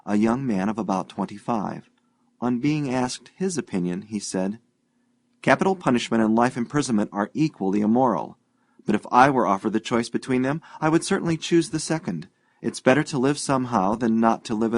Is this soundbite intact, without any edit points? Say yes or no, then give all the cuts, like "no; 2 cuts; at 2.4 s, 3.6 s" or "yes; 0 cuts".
yes; 0 cuts